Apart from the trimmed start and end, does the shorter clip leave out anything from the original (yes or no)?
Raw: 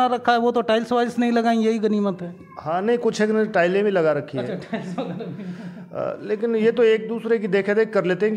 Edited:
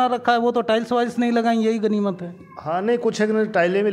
no